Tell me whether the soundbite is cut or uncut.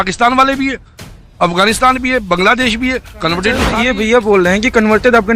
cut